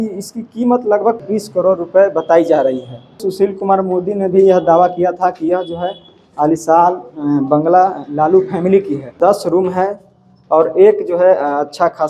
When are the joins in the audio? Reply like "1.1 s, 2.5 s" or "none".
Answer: 1.2 s, 3.2 s, 9.1 s